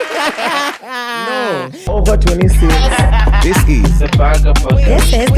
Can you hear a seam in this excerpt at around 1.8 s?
yes; 1 cut; at 1.8 s

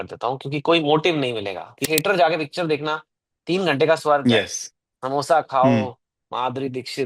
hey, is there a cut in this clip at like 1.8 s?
yes; 1 cut; at 1.8 s

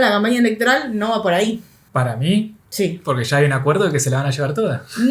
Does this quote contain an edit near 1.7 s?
yes; 1 cut; at 1.7 s

